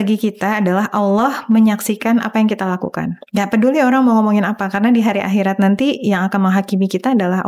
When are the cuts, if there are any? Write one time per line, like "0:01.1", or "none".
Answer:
none